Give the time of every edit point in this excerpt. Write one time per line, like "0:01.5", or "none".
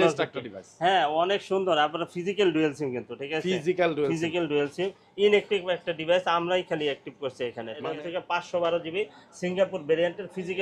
0:07.8

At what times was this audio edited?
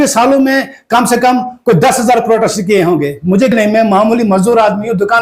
0:03.5

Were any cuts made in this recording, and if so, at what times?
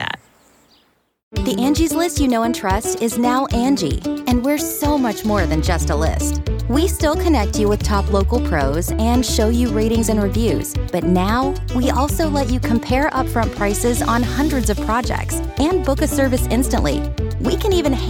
0:01.2

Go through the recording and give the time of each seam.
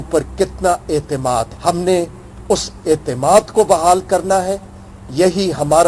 0:01.5

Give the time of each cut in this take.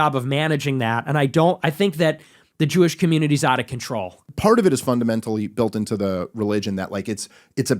0:04.3

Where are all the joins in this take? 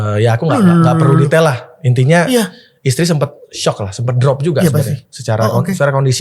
none

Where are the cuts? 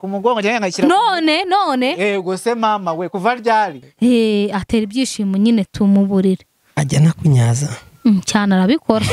0:03.8

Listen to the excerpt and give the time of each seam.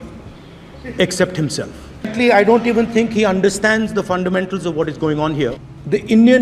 0:02.1
0:05.6

